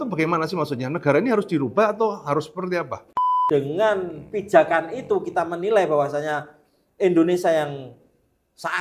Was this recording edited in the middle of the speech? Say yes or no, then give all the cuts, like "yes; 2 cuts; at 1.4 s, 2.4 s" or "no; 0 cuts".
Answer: yes; 1 cut; at 3.1 s